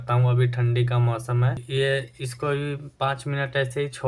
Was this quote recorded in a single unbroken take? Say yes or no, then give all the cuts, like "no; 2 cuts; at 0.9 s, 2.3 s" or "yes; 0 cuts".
no; 1 cut; at 1.6 s